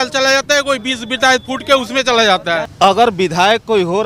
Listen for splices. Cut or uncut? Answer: cut